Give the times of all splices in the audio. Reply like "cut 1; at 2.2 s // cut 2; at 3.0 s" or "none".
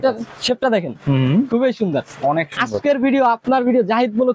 none